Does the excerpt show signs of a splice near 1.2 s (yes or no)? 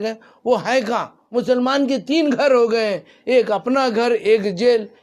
yes